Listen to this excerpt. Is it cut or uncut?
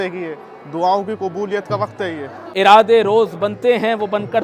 cut